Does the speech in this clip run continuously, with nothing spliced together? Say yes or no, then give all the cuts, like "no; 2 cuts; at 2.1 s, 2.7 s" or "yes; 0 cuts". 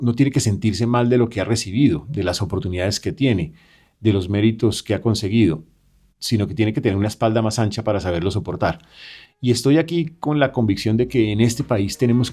yes; 0 cuts